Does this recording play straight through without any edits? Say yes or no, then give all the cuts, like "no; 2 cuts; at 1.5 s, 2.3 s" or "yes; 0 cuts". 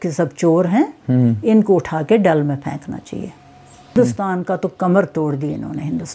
no; 1 cut; at 4.0 s